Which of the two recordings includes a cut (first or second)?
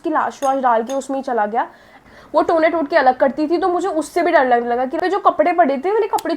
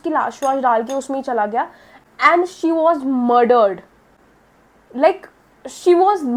first